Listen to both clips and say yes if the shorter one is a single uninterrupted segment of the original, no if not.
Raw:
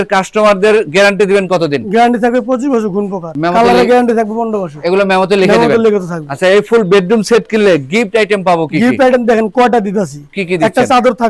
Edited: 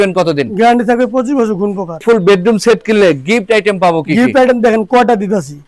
no